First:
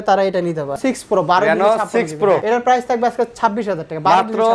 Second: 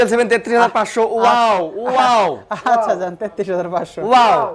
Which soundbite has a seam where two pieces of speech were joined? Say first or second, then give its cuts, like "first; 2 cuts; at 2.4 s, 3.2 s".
first; 2 cuts; at 0.8 s, 2.4 s